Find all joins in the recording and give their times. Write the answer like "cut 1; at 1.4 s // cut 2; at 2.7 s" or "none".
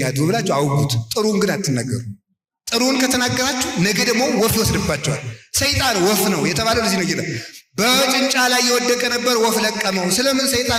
none